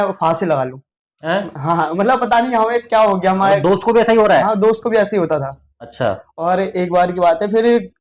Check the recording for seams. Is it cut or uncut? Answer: uncut